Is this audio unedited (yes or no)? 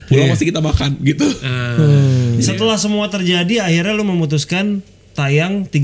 no